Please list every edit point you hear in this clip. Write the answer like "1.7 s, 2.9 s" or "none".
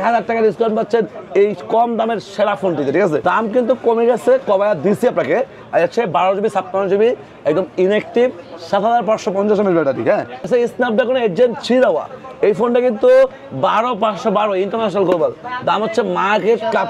3.2 s, 10.5 s